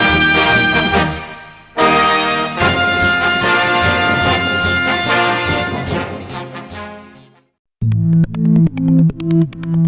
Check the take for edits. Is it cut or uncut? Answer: uncut